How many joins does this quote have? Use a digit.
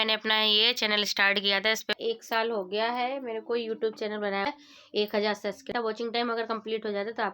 3